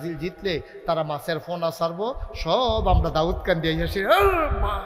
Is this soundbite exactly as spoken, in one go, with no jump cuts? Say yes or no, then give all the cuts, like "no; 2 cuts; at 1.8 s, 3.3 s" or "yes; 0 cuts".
yes; 0 cuts